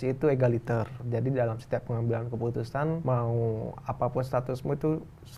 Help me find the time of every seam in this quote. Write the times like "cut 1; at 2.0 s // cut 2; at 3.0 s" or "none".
cut 1; at 1.0 s // cut 2; at 3.0 s